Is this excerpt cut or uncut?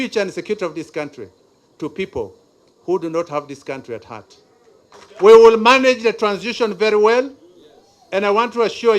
cut